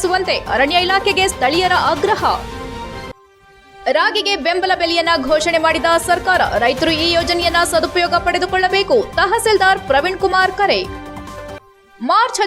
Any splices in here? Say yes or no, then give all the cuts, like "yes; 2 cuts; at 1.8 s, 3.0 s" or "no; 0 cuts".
no; 0 cuts